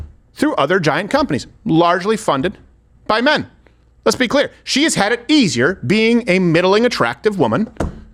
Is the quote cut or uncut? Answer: uncut